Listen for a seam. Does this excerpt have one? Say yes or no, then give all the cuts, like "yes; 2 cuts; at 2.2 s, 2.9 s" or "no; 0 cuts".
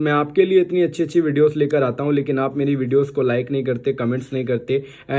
no; 0 cuts